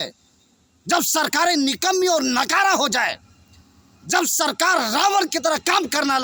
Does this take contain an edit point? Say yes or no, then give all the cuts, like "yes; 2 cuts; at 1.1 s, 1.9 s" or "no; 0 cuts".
no; 0 cuts